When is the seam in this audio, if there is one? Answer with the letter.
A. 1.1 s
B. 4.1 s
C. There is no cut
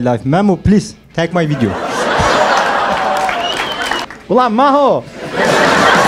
B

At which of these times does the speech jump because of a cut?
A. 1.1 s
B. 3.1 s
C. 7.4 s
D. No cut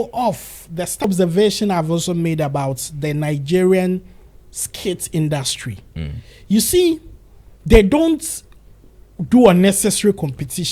A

